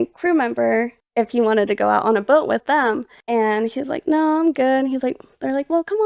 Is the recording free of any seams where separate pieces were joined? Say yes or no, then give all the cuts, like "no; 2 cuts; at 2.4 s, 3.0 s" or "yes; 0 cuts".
no; 2 cuts; at 1.0 s, 2.6 s